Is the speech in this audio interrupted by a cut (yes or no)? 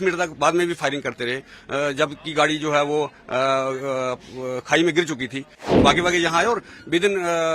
yes